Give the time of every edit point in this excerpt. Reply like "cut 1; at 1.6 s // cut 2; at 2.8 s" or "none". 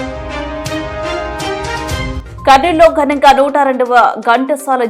cut 1; at 2.2 s